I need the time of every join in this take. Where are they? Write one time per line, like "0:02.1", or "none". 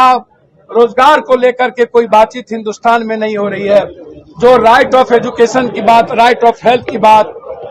none